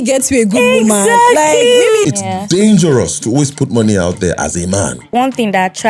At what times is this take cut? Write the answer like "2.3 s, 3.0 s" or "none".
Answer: 2.0 s, 5.1 s